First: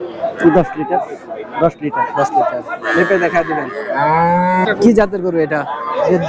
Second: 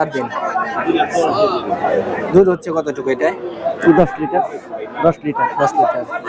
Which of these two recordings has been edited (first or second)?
first